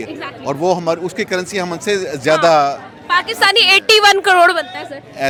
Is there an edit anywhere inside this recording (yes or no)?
no